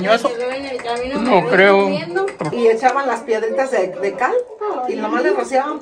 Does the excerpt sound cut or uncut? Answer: cut